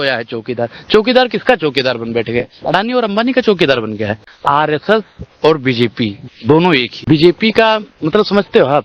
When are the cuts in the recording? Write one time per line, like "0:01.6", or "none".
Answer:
0:04.3
0:06.9